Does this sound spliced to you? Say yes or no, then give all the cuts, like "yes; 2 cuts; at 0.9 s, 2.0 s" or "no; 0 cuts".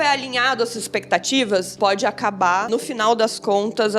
yes; 2 cuts; at 1.7 s, 2.7 s